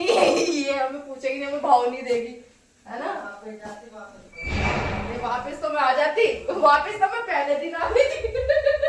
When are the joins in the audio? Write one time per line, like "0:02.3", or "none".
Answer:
none